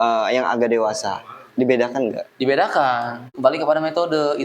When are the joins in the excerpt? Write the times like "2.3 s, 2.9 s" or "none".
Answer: 3.2 s